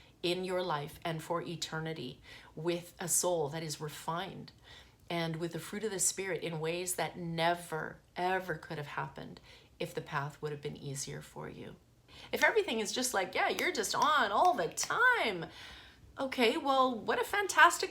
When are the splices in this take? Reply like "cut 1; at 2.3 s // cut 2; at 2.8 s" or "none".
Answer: cut 1; at 12.1 s